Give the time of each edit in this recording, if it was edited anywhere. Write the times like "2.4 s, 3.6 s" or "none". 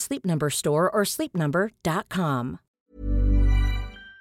2.8 s